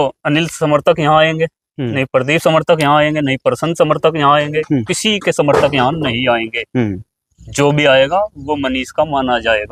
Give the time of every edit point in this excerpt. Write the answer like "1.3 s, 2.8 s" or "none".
none